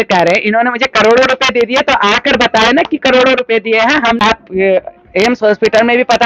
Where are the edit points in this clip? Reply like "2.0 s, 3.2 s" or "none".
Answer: 4.2 s